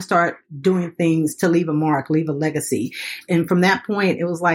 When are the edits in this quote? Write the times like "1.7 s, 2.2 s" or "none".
3.2 s